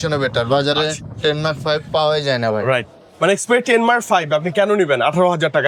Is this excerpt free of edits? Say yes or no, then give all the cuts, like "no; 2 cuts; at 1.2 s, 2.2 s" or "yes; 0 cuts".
yes; 0 cuts